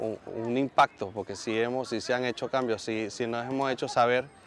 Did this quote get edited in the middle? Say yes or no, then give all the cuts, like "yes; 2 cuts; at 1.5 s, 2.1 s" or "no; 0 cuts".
no; 0 cuts